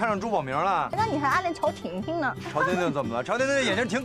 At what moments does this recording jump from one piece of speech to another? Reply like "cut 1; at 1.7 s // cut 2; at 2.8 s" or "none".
cut 1; at 0.9 s